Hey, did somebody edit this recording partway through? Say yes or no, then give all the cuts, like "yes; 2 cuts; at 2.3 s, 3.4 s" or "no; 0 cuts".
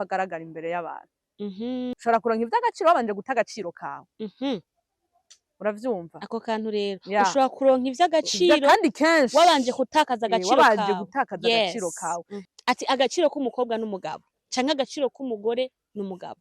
yes; 2 cuts; at 1.9 s, 12.3 s